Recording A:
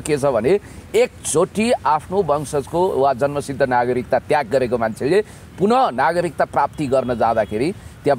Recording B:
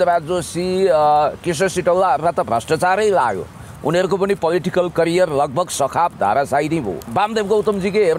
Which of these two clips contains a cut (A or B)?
B